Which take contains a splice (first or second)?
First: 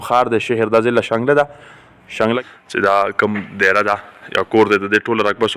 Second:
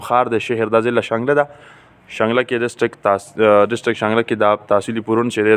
first